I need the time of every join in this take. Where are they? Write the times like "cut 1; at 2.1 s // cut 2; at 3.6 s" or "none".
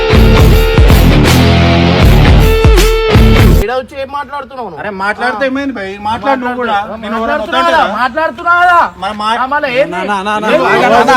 cut 1; at 3.6 s

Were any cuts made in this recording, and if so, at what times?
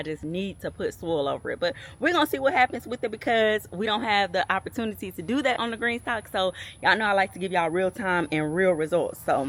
none

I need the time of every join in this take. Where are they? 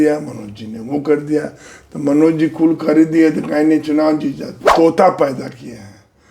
cut 1; at 4.5 s

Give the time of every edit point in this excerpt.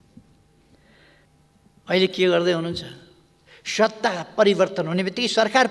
cut 1; at 1.3 s

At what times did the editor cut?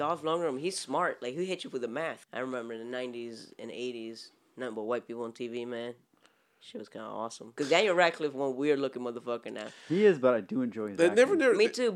cut 1; at 2.2 s // cut 2; at 7.4 s

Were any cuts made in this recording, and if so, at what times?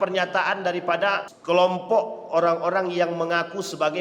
cut 1; at 1.3 s

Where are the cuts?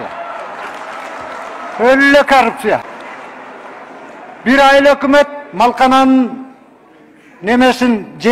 cut 1; at 2.8 s

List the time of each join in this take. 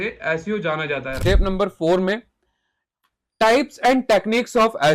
cut 1; at 1.1 s

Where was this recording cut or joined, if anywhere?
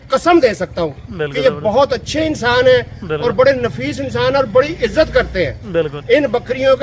none

